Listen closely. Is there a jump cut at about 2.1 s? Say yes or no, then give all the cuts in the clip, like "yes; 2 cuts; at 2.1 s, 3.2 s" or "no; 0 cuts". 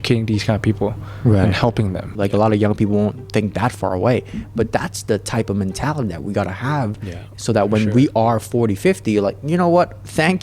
yes; 1 cut; at 2.1 s